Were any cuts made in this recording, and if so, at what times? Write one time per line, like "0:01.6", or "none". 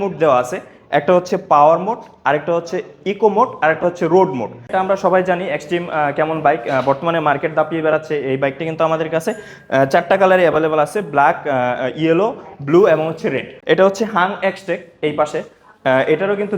0:04.6
0:13.5